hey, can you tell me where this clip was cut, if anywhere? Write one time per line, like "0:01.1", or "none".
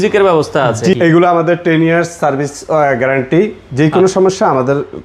0:00.9